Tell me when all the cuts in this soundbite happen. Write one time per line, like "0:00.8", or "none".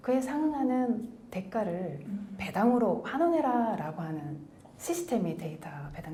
none